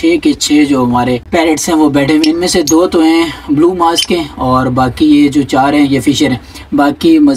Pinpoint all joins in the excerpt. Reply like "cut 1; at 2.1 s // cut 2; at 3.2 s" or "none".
cut 1; at 1.2 s